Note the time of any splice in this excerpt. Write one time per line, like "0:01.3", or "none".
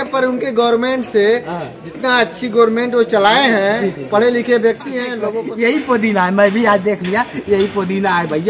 0:05.2